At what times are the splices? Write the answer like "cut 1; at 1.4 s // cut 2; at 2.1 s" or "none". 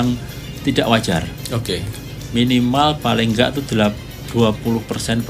none